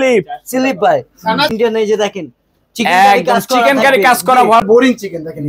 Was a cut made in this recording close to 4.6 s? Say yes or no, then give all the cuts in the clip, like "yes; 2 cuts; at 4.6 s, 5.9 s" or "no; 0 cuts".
yes; 2 cuts; at 1.5 s, 4.6 s